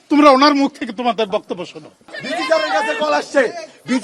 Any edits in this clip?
yes; 1 cut; at 2.2 s

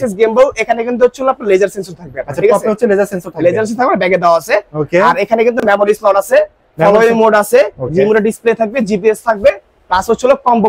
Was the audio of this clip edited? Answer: no; 0 cuts

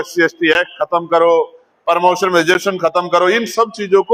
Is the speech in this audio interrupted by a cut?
no; 0 cuts

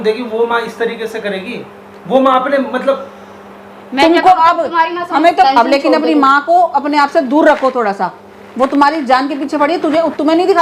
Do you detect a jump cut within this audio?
yes; 1 cut; at 5.5 s

